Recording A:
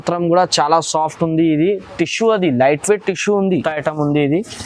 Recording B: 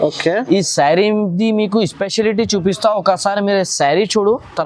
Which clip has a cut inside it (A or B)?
A